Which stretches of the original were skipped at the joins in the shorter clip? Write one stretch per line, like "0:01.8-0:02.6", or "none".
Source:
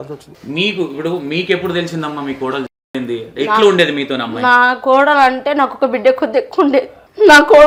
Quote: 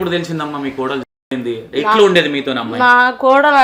none